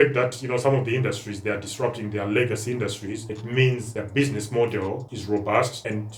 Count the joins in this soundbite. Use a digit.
0